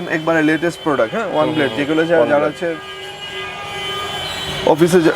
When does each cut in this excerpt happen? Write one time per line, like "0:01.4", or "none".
none